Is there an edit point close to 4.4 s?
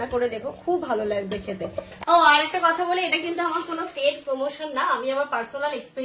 no; 1 cut; at 1.9 s

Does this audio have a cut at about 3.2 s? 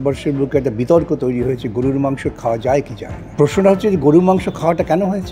no; 0 cuts

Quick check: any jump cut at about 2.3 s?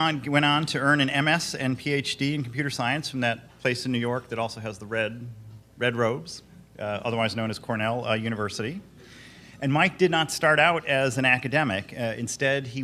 no; 1 cut; at 4.8 s

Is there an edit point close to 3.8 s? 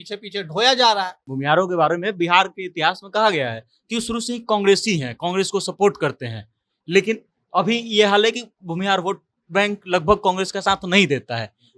no; 1 cut; at 1.2 s

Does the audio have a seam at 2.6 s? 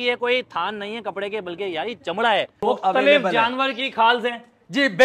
yes; 1 cut; at 2.6 s

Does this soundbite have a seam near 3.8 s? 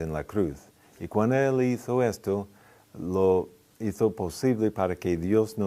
no; 1 cut; at 1.5 s

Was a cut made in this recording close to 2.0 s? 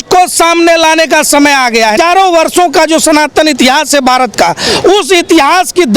yes; 1 cut; at 2.0 s

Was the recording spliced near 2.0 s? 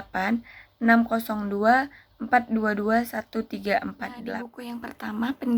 no; 1 cut; at 4.2 s

